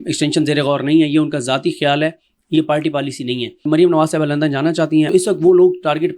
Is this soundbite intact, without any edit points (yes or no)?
no